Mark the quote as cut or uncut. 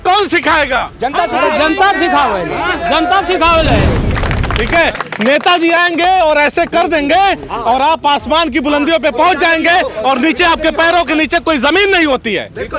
cut